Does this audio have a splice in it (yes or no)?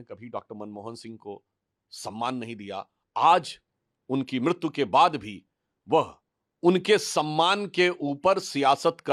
no